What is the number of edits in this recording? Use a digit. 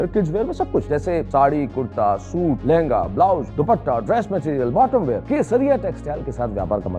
4